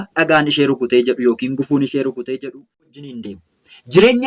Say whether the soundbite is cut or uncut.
cut